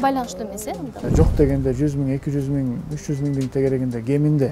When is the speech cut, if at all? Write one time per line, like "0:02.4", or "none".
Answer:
0:01.0

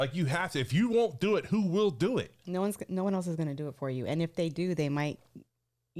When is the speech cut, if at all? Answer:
none

